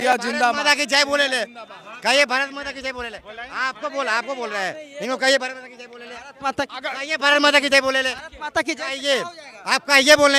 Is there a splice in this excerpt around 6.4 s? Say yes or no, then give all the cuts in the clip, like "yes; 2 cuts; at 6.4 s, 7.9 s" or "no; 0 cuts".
no; 0 cuts